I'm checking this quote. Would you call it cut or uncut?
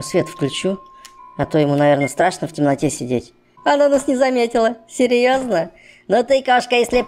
cut